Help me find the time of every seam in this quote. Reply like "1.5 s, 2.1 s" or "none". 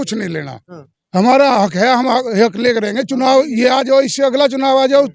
none